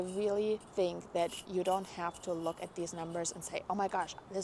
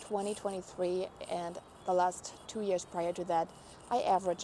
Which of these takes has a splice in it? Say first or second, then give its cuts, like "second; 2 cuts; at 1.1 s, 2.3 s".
second; 1 cut; at 1.9 s